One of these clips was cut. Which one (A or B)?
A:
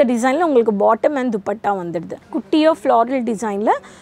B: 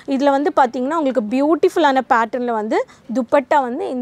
A